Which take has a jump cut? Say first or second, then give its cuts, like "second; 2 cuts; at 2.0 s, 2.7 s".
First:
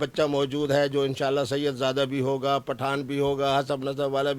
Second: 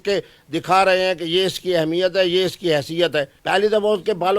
second; 1 cut; at 3.3 s